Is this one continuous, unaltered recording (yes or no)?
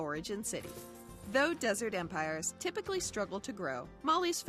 no